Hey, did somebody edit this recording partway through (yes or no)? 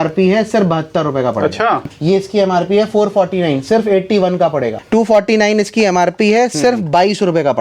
yes